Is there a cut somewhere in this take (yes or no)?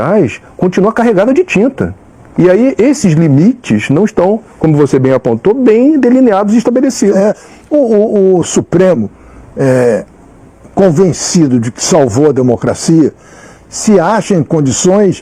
no